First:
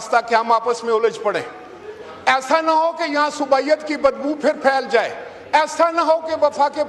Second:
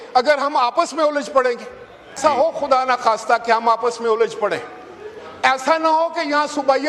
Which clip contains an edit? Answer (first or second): second